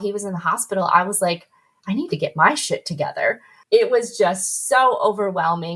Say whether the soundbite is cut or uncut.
cut